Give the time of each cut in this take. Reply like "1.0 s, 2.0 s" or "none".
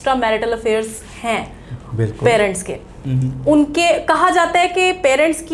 none